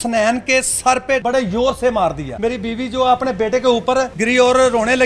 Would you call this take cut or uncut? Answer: cut